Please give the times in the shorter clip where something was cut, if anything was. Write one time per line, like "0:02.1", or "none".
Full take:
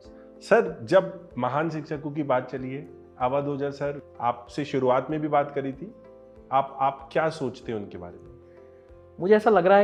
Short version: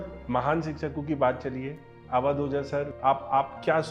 0:02.9